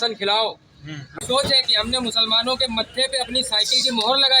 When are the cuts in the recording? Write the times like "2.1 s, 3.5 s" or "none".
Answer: 1.2 s